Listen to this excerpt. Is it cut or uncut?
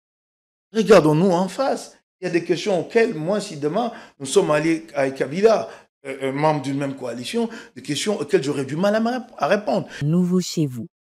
uncut